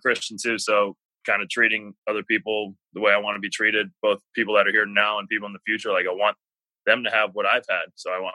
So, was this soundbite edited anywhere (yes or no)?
no